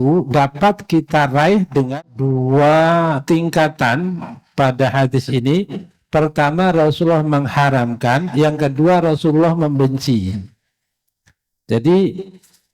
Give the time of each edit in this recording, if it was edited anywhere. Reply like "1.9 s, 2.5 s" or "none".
1.9 s